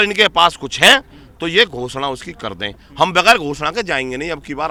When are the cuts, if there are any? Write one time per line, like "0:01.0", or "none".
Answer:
none